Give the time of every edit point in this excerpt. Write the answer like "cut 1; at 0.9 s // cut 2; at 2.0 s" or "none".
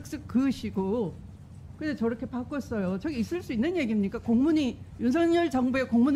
none